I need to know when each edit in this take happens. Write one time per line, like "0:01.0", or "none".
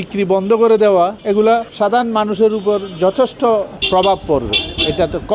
0:01.3
0:03.8